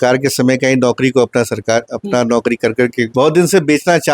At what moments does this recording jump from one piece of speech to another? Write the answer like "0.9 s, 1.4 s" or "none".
3.1 s